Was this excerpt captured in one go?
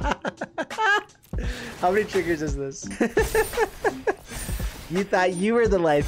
no; 2 cuts; at 2.8 s, 4.2 s

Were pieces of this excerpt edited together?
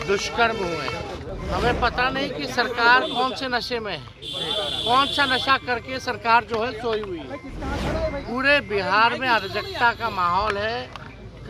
yes; 1 cut; at 1.3 s

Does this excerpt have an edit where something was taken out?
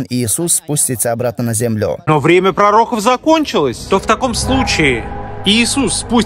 yes; 2 cuts; at 2.1 s, 3.8 s

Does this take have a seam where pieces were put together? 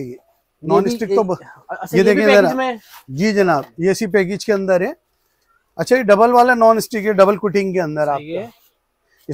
no; 0 cuts

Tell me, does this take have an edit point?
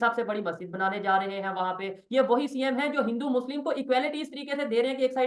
no; 0 cuts

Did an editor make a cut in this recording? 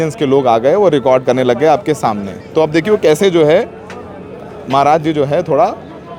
no; 0 cuts

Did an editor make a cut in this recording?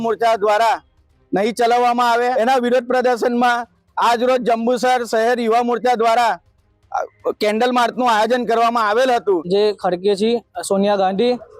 yes; 2 cuts; at 2.3 s, 9.4 s

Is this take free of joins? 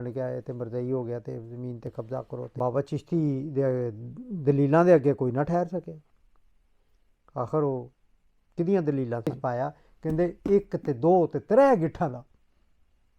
no; 2 cuts; at 2.5 s, 9.4 s

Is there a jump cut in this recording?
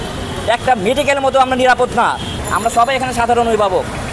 no; 0 cuts

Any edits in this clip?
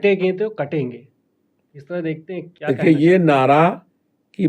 yes; 1 cut; at 2.5 s

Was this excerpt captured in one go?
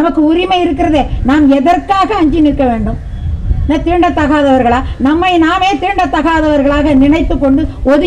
yes; 0 cuts

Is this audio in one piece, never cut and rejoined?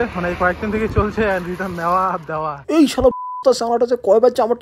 yes; 0 cuts

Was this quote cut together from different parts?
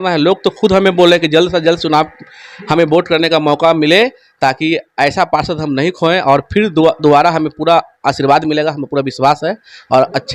no; 0 cuts

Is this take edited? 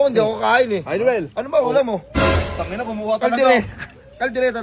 no; 0 cuts

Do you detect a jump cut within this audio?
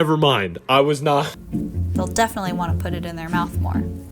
yes; 1 cut; at 1.4 s

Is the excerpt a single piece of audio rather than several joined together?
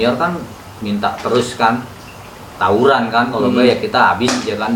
yes; 0 cuts

